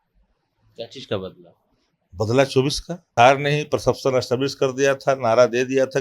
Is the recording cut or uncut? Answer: cut